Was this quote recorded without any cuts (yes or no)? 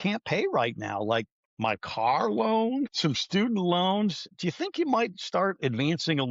no